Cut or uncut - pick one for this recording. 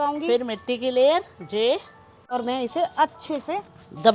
cut